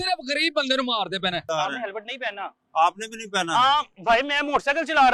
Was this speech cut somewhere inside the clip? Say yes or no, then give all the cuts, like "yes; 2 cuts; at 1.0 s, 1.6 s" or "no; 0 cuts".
yes; 1 cut; at 1.5 s